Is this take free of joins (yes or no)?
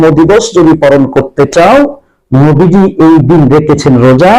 yes